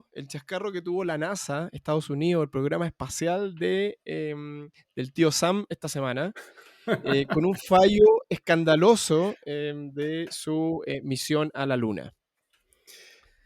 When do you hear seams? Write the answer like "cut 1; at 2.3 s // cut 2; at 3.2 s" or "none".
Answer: none